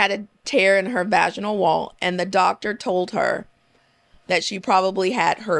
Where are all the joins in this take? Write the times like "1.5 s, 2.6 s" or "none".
none